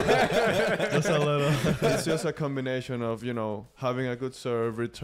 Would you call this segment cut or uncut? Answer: cut